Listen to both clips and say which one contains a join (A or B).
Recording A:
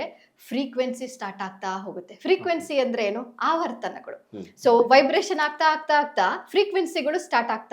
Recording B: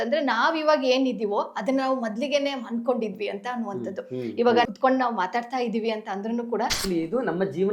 B